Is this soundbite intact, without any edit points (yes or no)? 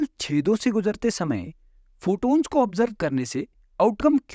yes